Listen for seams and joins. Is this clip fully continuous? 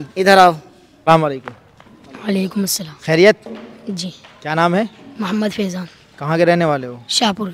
no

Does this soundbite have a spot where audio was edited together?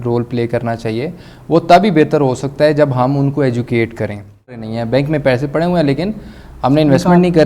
yes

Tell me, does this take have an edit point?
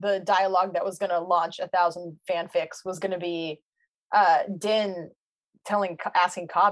no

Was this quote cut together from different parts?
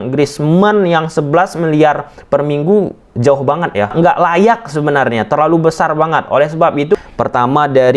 yes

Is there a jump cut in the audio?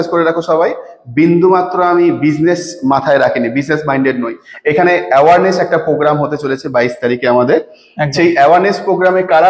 yes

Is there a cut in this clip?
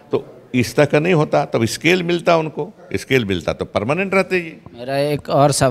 no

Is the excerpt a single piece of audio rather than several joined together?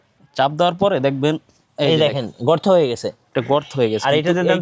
yes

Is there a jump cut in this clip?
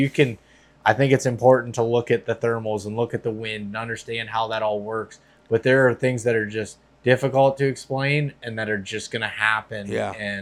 no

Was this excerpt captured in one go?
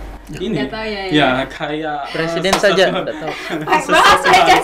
yes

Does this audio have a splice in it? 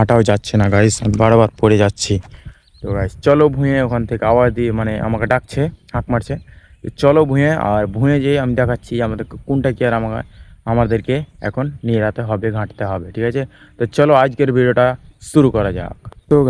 no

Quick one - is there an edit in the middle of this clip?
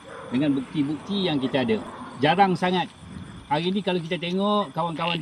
yes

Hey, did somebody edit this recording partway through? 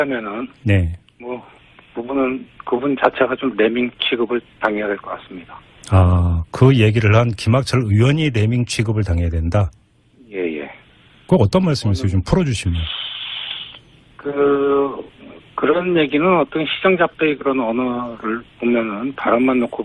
no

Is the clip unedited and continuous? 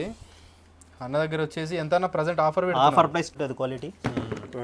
no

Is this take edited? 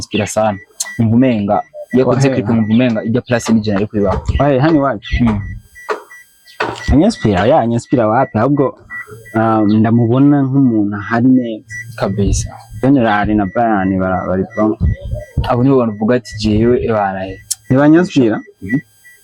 no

